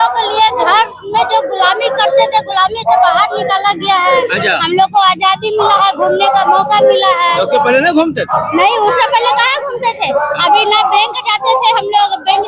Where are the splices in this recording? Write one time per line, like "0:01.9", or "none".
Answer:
none